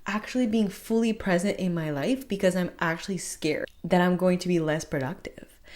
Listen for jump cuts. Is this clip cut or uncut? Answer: cut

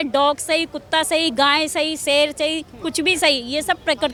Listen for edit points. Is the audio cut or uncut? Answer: uncut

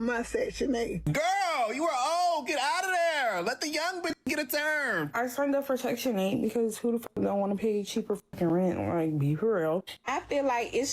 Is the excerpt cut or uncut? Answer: cut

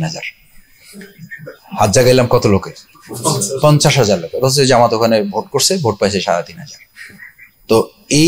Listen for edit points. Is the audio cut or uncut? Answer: uncut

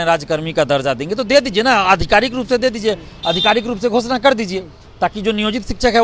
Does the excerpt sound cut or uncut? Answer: uncut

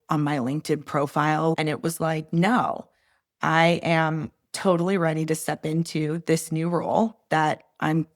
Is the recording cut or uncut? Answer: cut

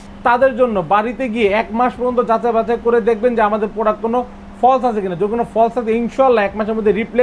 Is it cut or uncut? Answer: uncut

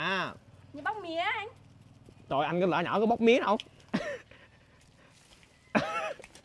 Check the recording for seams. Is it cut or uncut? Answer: uncut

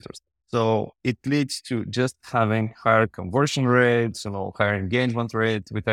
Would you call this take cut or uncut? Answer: cut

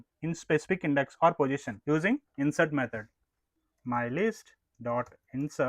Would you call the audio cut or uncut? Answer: cut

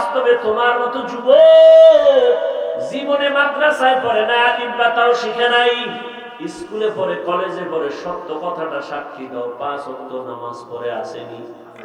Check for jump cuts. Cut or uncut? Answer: cut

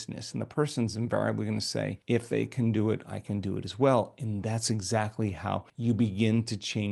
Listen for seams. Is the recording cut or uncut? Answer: cut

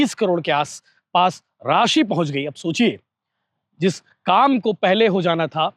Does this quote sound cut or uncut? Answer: uncut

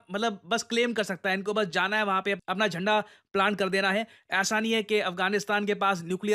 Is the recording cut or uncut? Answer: uncut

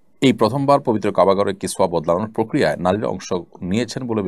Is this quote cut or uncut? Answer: uncut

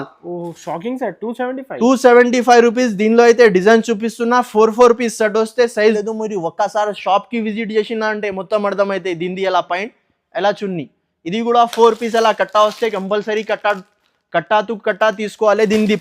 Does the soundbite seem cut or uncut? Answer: cut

